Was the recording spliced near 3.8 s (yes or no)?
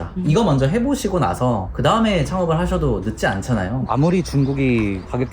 yes